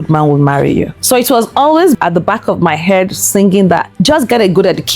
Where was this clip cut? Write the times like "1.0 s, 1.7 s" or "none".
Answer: 2.0 s